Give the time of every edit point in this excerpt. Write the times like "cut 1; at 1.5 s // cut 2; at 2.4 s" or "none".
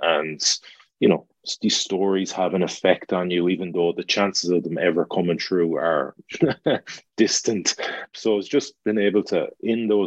cut 1; at 8.1 s